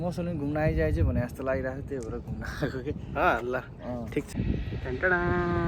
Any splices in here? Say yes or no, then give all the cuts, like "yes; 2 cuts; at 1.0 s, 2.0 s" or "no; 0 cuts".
yes; 1 cut; at 4.3 s